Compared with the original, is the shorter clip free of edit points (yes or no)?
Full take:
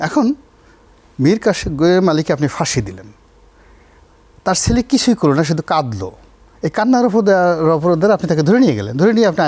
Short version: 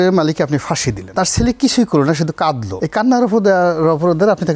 no